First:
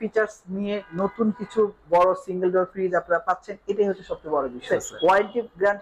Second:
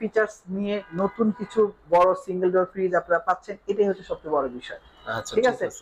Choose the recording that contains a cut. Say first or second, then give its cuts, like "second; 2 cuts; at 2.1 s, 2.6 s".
first; 1 cut; at 4.7 s